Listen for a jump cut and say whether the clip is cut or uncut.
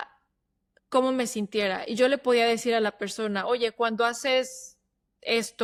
uncut